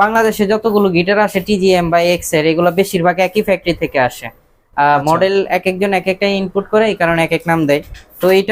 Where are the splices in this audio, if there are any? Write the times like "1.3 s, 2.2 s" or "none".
none